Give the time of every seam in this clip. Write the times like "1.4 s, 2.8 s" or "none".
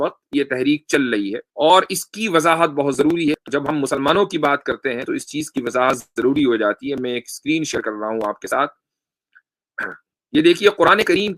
1.4 s, 3.4 s